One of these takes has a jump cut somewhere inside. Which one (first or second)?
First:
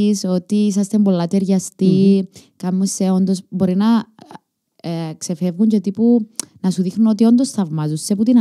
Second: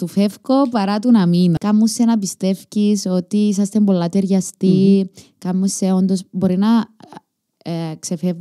second